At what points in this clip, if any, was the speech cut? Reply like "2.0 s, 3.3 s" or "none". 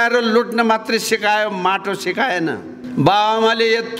2.7 s